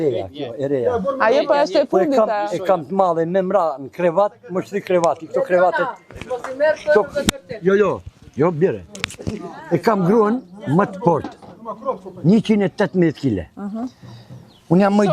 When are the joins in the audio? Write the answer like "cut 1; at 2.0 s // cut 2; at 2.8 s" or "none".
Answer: none